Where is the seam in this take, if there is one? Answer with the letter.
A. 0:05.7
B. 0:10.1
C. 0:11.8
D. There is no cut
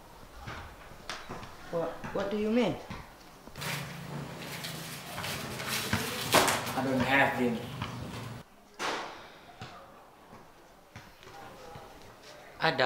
C